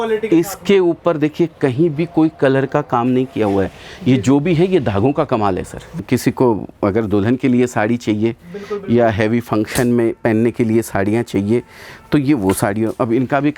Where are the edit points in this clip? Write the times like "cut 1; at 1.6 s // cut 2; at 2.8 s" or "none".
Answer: cut 1; at 6.0 s

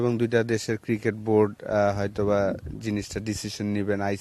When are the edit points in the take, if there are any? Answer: none

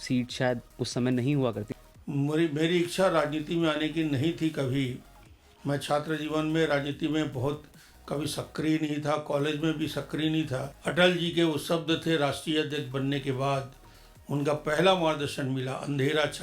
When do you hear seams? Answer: cut 1; at 1.7 s // cut 2; at 10.7 s

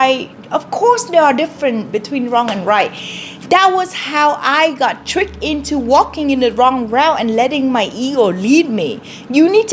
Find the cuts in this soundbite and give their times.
none

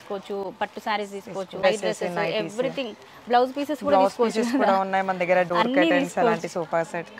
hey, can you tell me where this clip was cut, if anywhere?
none

